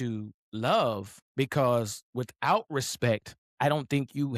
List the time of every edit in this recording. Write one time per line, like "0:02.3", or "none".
0:01.1
0:03.4